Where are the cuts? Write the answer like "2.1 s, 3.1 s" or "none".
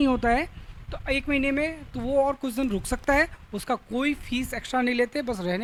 none